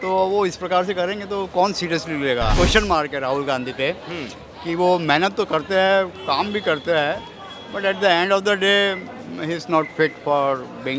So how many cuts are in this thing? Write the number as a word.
one